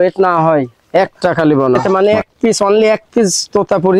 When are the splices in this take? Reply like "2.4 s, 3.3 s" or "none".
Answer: 1.8 s

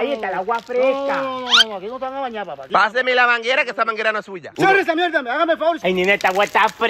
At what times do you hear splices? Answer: 2.6 s, 5.8 s

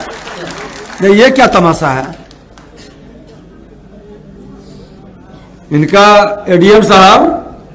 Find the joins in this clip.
none

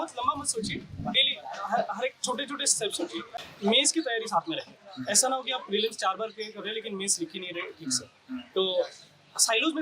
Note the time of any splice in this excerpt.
3.4 s

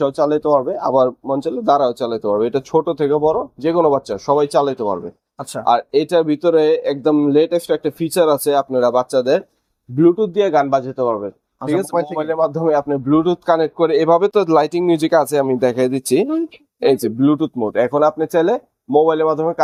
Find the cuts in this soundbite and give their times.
none

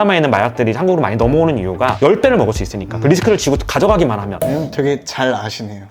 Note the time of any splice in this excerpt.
4.3 s

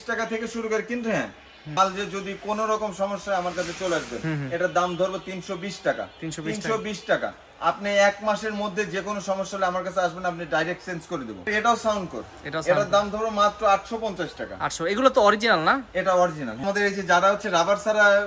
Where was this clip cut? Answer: 1.8 s, 11.5 s, 16.6 s

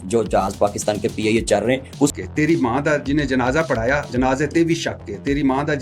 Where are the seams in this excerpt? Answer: 2.1 s

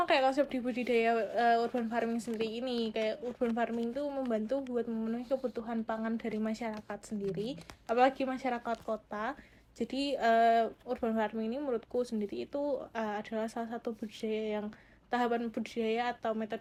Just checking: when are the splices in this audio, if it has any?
none

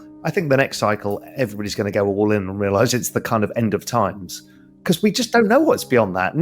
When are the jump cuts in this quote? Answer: 3.9 s

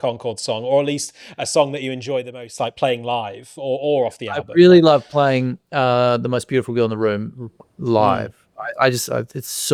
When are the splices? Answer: none

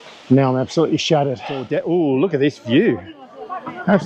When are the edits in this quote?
1.7 s

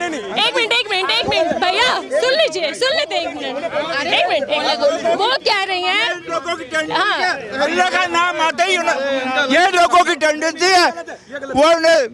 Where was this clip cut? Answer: none

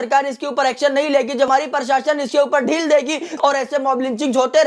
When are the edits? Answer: 3.4 s

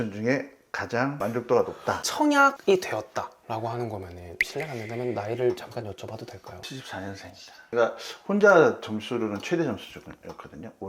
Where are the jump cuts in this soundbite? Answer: 2.0 s, 7.7 s

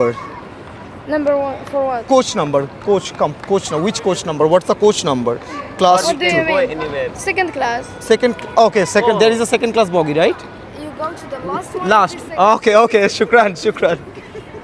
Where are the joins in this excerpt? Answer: none

